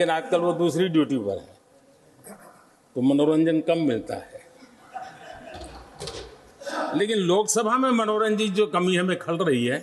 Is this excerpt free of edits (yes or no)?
yes